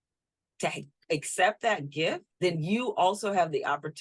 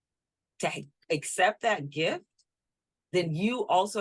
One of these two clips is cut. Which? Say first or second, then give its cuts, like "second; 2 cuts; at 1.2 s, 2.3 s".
first; 1 cut; at 2.3 s